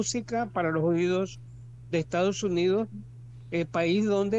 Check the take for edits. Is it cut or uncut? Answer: uncut